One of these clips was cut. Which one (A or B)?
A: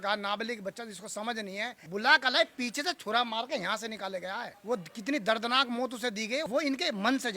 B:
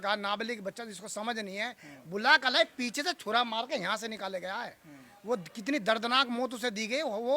A